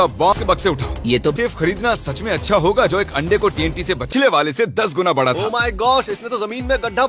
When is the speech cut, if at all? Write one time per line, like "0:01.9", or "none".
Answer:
0:01.3
0:04.0